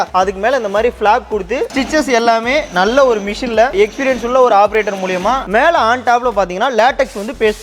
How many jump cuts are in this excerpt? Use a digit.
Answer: 2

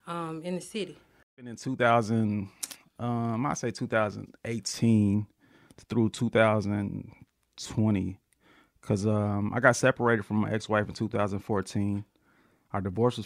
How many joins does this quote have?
1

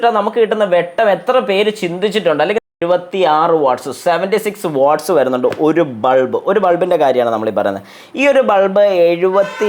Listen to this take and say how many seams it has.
1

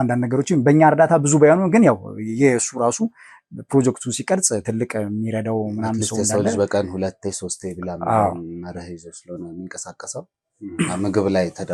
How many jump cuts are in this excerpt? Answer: 0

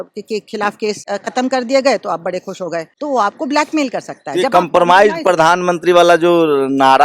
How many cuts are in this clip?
2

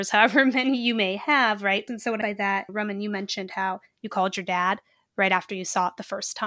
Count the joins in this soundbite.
0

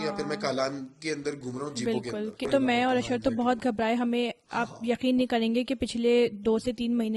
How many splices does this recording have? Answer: 1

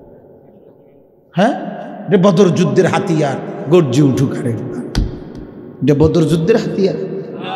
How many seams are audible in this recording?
0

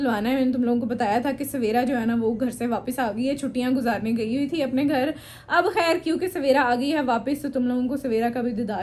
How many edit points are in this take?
0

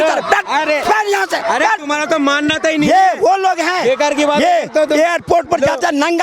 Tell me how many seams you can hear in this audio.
0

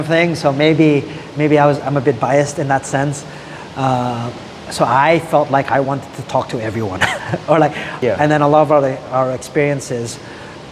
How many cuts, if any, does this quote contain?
1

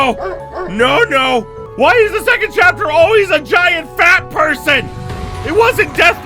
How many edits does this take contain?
1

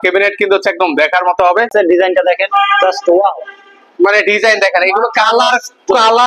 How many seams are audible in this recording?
1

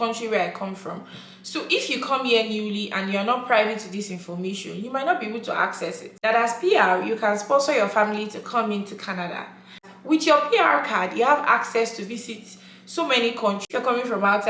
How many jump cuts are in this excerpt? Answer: 3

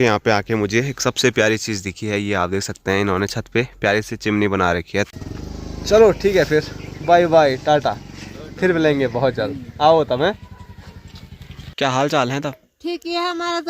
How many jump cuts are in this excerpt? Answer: 2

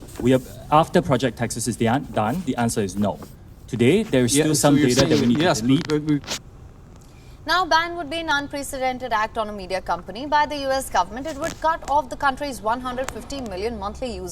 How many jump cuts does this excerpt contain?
1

